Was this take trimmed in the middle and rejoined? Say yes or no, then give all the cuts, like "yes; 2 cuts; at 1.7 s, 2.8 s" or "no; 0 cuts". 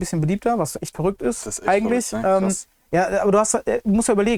no; 0 cuts